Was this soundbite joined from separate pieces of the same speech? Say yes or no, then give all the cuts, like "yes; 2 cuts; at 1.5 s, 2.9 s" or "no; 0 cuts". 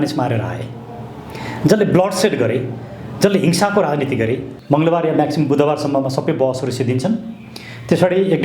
yes; 1 cut; at 4.5 s